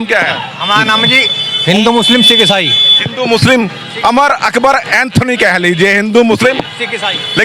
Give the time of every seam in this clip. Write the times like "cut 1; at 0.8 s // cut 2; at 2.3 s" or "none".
none